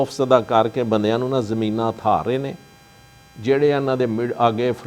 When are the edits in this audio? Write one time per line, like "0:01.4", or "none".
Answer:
none